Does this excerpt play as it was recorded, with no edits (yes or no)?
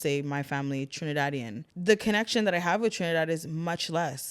no